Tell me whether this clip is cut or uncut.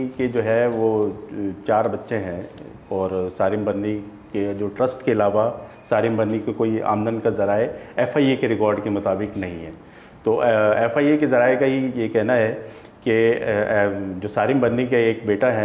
uncut